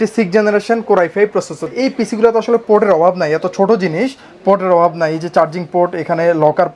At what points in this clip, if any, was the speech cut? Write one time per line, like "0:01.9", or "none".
0:01.8